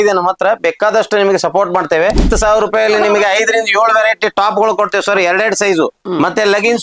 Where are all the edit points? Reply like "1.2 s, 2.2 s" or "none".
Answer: 2.3 s